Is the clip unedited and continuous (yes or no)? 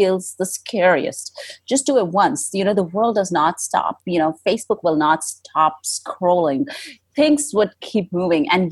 yes